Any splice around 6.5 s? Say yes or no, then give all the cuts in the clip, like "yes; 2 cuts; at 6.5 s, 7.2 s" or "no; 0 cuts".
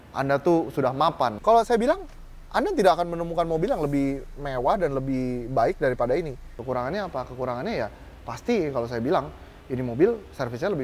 yes; 2 cuts; at 1.4 s, 6.5 s